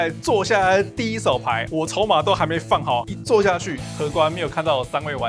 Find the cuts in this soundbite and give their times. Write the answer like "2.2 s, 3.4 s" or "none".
3.1 s, 3.8 s